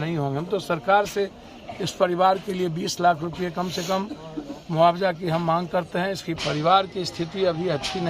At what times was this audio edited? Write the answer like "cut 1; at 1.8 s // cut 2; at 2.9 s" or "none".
cut 1; at 6.4 s